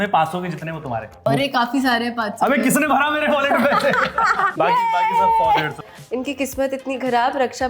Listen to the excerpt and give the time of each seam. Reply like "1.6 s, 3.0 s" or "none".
1.1 s, 4.5 s, 5.9 s